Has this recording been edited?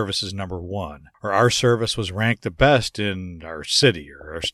yes; 1 cut; at 1.0 s

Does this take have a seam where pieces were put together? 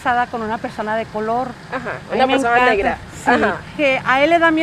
yes; 1 cut; at 3.7 s

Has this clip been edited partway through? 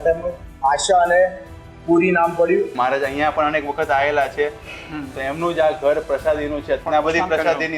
yes; 2 cuts; at 2.7 s, 6.8 s

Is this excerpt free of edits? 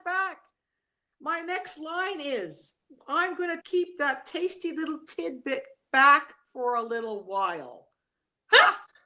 no; 1 cut; at 3.6 s

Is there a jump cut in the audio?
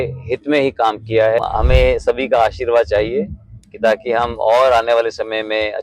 yes; 1 cut; at 1.4 s

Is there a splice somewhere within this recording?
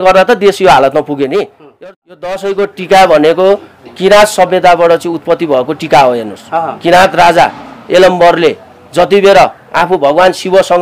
yes; 1 cut; at 1.6 s

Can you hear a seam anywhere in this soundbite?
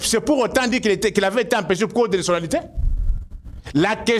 no; 0 cuts

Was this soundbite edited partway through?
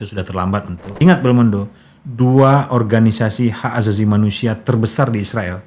yes; 1 cut; at 0.9 s

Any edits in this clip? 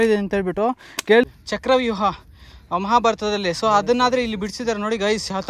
yes; 1 cut; at 1.2 s

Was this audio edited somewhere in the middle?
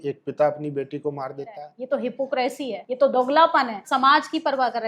yes; 3 cuts; at 1.7 s, 2.8 s, 3.9 s

